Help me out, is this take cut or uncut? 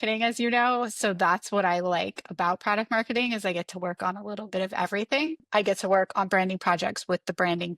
cut